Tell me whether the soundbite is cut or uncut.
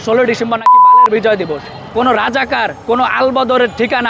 cut